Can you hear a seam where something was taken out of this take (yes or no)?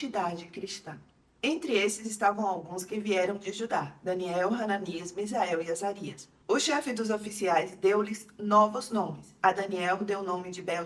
no